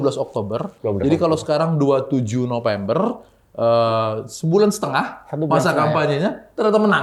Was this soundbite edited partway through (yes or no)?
no